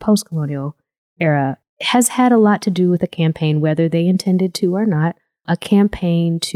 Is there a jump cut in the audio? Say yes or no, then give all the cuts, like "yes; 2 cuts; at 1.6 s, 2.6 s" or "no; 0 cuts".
yes; 1 cut; at 5.4 s